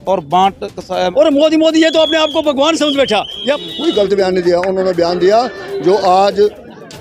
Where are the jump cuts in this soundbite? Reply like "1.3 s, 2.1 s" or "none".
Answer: 1.1 s, 3.6 s